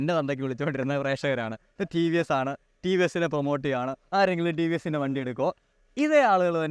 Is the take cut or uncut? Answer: uncut